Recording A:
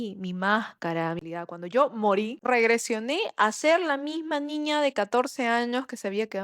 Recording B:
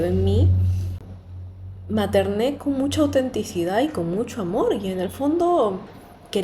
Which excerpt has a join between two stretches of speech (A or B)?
A